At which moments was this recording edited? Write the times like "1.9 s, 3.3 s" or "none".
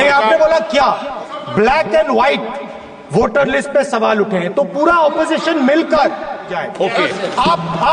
1.1 s, 6.6 s